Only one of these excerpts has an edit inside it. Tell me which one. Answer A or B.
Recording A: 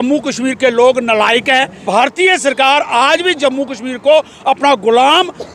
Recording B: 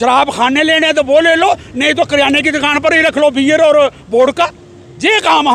A